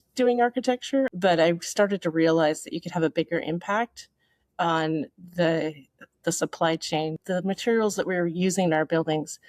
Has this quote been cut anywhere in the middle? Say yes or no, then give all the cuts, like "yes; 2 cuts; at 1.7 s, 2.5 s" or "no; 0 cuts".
yes; 1 cut; at 1.1 s